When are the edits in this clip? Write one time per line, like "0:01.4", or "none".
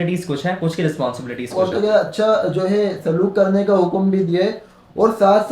0:01.5